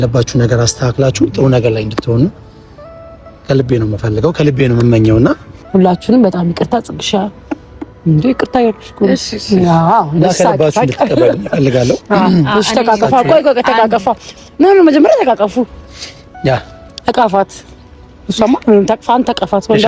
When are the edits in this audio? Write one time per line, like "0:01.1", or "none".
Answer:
0:05.5